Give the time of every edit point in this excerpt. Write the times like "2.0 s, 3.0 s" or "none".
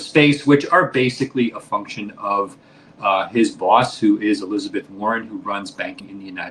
none